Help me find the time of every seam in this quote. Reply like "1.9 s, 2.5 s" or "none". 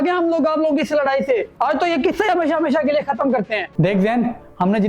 1.5 s, 3.7 s